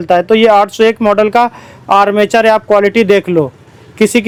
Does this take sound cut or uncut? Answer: uncut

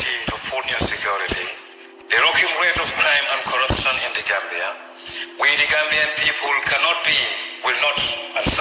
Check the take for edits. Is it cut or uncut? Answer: uncut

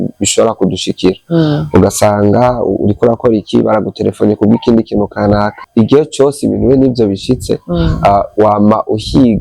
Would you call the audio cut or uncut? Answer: cut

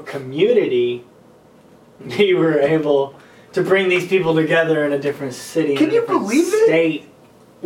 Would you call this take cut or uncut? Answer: uncut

